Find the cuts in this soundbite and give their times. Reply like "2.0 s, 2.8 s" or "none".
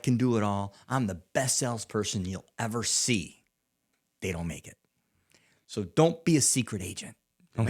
5.5 s